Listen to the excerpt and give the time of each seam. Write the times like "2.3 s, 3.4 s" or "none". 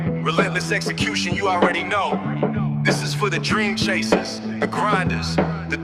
none